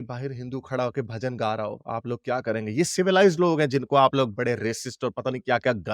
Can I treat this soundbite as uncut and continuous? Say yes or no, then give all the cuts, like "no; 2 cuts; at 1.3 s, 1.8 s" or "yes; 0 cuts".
yes; 0 cuts